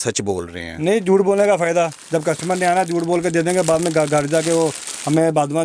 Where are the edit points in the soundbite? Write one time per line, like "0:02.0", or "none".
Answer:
none

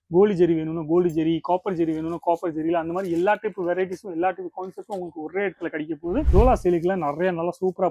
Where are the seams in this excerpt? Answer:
0:06.3

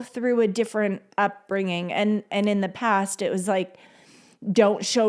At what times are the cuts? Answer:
none

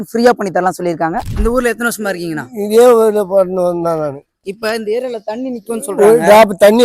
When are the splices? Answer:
0:01.3

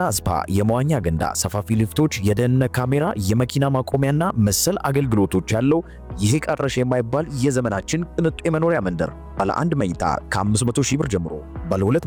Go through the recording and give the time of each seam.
none

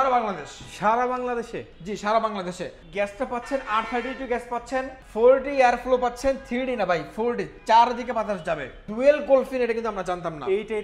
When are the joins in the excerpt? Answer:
0:02.8
0:05.0
0:08.8

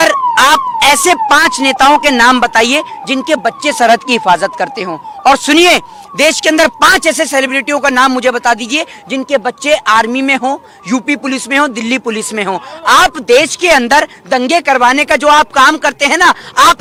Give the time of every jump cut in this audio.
none

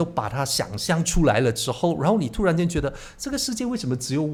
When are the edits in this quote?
none

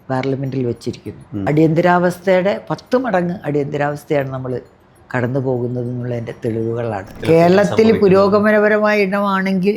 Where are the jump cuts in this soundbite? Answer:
0:01.3
0:07.2

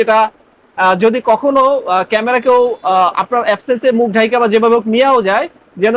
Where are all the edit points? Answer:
none

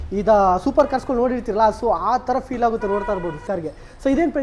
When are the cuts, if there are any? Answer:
0:03.4

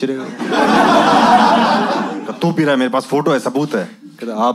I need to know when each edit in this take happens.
0:02.2

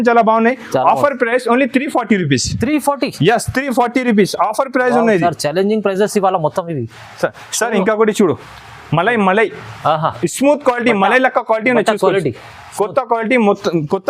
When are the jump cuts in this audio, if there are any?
none

